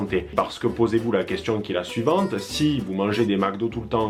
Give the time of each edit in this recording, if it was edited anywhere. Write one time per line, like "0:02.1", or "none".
none